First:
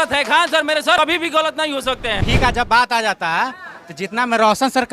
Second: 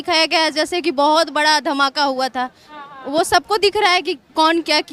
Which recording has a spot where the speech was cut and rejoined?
first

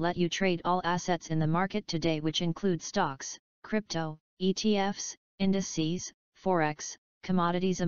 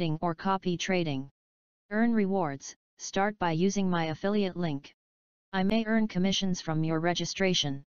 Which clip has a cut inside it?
second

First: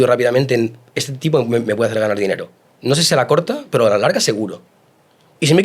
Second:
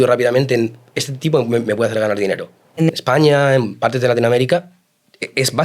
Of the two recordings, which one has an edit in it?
second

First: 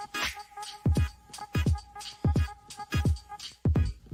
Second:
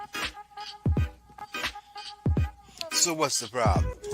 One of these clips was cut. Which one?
second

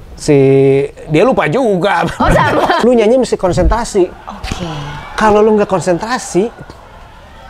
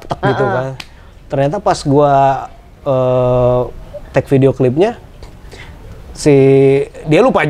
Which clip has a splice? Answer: first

